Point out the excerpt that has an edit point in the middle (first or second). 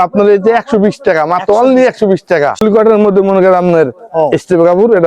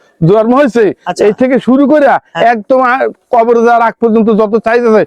first